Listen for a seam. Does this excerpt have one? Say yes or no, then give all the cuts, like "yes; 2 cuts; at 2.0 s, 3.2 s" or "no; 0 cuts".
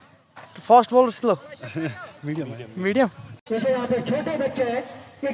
yes; 1 cut; at 3.4 s